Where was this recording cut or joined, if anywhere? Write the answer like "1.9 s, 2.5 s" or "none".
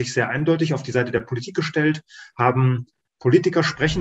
none